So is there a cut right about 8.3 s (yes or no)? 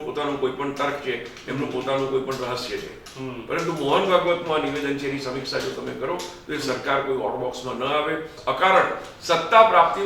yes